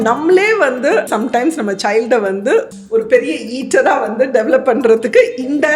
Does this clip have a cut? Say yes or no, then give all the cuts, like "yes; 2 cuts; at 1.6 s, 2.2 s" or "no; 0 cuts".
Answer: yes; 2 cuts; at 1.1 s, 2.7 s